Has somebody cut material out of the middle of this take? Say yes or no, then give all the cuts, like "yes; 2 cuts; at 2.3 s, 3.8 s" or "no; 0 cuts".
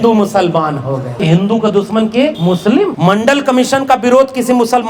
yes; 2 cuts; at 1.2 s, 2.5 s